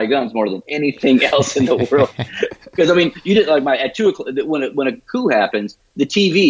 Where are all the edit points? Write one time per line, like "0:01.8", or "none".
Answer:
none